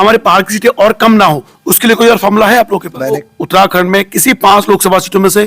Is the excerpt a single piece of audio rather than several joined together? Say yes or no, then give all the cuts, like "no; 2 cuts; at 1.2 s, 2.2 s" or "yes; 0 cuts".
no; 1 cut; at 3.3 s